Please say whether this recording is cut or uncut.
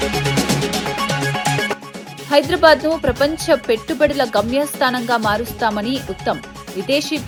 uncut